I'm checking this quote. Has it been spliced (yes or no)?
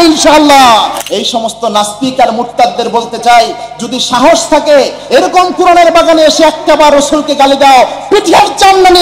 yes